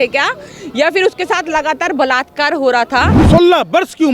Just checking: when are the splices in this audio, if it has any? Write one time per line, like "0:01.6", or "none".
0:03.2